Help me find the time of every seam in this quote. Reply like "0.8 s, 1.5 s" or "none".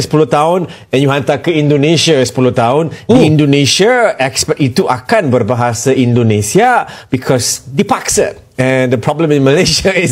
none